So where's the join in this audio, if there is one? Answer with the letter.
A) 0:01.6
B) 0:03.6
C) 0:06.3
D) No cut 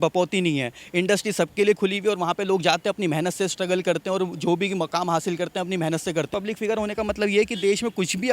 C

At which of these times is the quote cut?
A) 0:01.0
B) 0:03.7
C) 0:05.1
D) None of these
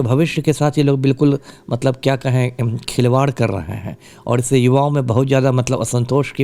D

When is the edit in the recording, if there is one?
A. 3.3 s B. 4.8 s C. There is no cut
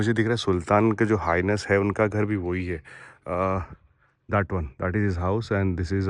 C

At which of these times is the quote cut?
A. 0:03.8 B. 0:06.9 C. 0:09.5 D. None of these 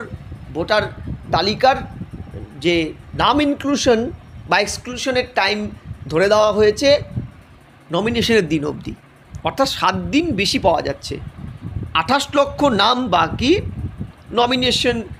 D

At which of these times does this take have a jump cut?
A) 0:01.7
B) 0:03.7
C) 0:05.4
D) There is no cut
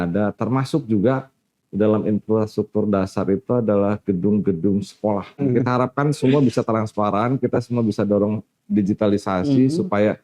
C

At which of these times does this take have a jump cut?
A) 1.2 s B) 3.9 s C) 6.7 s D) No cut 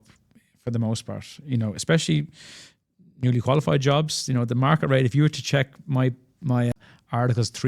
C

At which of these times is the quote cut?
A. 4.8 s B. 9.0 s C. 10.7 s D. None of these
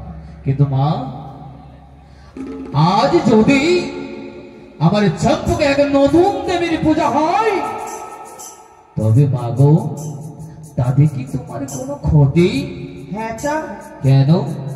D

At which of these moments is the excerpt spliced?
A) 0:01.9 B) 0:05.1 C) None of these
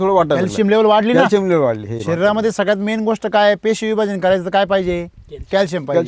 C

